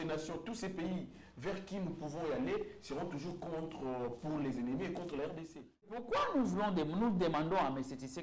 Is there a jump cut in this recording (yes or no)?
yes